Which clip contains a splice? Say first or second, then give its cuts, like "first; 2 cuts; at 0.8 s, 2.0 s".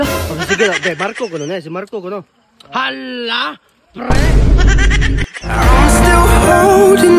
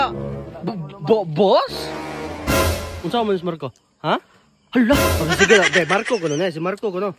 second; 1 cut; at 2.8 s